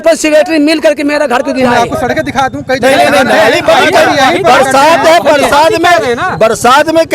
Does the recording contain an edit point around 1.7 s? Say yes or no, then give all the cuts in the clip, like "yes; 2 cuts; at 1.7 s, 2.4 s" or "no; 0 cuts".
yes; 1 cut; at 1.7 s